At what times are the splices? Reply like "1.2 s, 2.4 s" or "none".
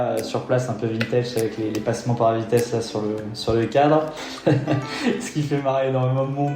4.2 s